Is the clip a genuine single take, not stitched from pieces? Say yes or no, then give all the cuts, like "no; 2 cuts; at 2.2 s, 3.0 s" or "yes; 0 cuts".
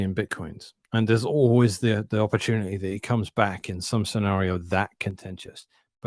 yes; 0 cuts